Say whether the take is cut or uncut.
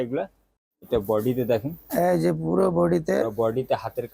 uncut